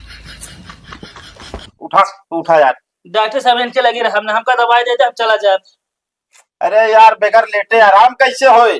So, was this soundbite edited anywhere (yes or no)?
yes